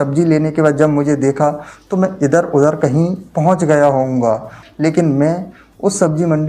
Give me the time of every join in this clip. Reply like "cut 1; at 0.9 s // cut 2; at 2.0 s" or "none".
cut 1; at 4.6 s

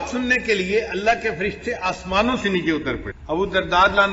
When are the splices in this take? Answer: cut 1; at 3.1 s

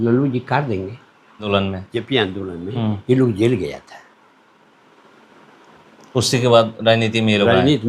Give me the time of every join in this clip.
cut 1; at 1.5 s

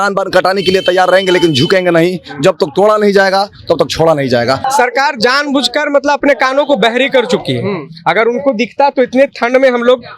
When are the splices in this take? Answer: cut 1; at 4.6 s

